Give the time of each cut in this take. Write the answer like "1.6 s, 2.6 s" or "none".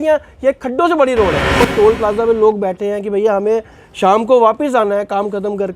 1.7 s